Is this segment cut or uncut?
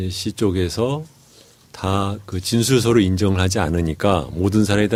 uncut